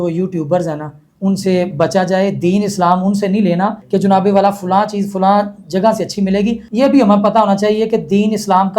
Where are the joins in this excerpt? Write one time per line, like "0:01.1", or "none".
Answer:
0:03.8
0:06.6